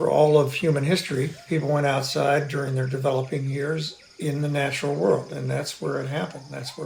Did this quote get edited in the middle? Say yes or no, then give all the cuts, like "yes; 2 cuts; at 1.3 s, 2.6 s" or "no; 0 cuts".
no; 0 cuts